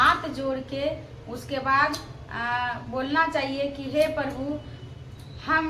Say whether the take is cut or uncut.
uncut